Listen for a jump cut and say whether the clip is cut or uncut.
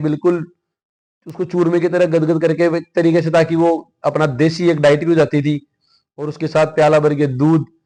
uncut